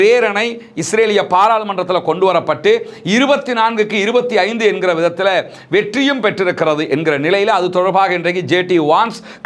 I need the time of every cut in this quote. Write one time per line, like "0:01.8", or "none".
none